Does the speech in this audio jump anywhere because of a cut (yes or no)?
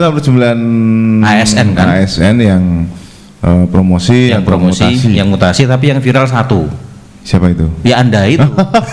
no